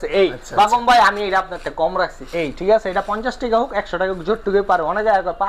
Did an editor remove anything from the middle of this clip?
no; 0 cuts

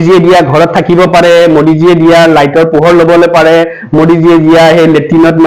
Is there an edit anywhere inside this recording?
no; 0 cuts

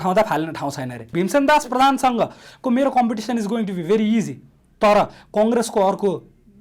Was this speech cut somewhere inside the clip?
yes; 1 cut; at 1.1 s

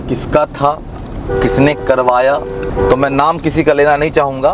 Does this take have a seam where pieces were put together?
yes; 1 cut; at 2.6 s

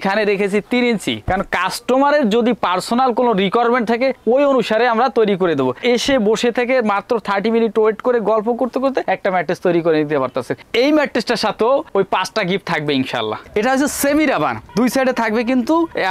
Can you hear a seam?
yes; 2 cuts; at 5.8 s, 13.5 s

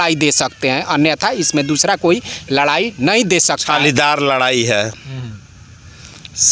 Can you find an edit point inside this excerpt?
yes; 1 cut; at 3.6 s

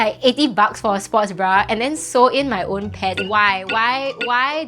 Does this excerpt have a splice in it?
yes; 1 cut; at 3.2 s

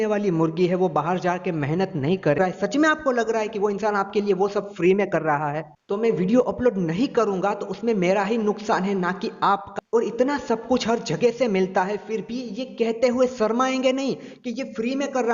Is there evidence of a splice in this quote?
yes; 3 cuts; at 2.4 s, 5.8 s, 9.7 s

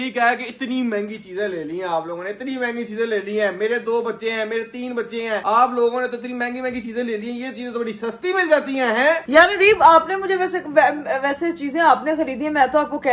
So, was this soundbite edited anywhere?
no; 0 cuts

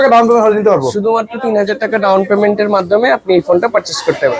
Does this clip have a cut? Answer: no; 0 cuts

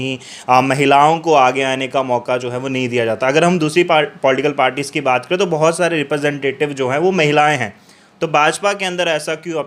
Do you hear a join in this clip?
no; 0 cuts

